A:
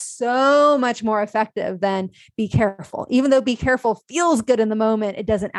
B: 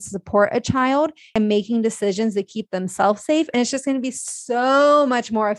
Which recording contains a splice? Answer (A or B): B